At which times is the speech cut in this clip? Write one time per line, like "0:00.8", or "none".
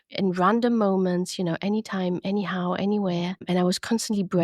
0:03.5